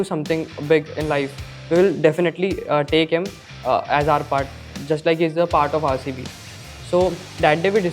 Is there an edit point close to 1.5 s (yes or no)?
no